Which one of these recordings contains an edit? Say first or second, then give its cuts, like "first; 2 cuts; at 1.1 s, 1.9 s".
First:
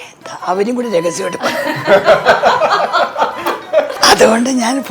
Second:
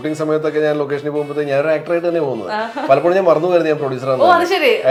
first; 1 cut; at 4.0 s